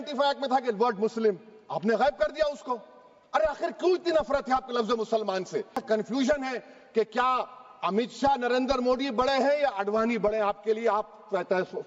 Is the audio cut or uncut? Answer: cut